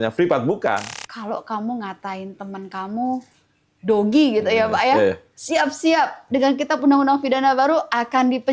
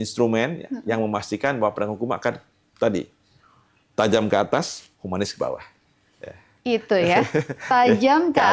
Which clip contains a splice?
first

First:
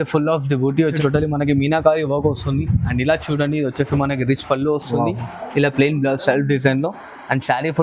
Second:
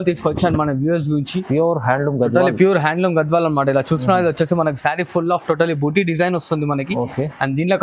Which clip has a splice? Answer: first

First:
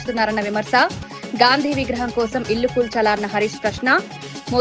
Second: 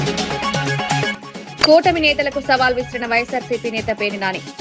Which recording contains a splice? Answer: second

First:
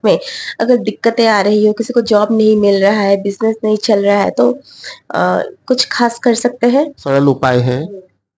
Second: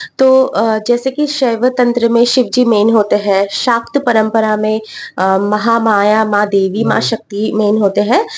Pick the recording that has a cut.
first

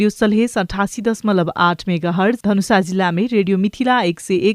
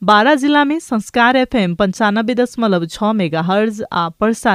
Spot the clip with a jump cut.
first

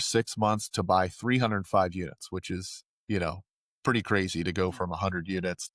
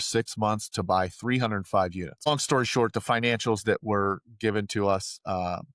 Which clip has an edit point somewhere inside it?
second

